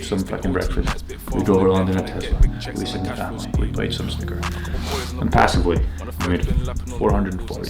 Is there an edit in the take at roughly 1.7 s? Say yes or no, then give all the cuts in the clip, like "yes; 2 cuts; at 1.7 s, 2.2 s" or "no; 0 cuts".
no; 0 cuts